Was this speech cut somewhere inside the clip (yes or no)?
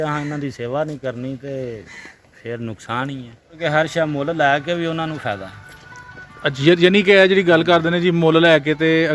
yes